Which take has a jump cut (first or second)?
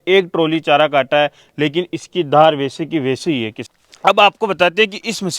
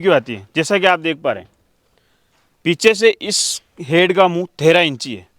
first